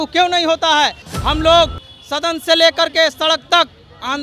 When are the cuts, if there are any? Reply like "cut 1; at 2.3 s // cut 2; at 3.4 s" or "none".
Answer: cut 1; at 1.1 s